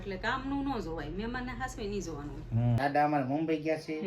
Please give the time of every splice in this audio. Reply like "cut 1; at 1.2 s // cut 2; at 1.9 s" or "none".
cut 1; at 2.8 s

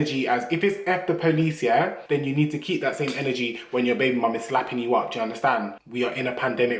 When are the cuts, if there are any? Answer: cut 1; at 2.0 s // cut 2; at 5.8 s

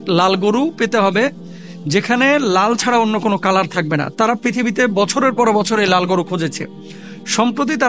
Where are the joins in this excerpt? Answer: none

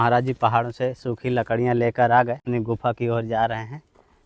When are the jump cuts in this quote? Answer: cut 1; at 2.4 s

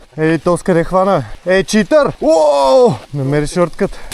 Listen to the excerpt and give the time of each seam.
cut 1; at 3.1 s

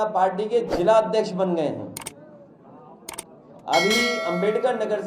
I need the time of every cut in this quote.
none

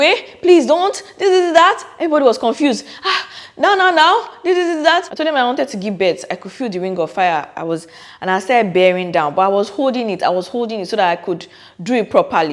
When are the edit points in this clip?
cut 1; at 5.1 s

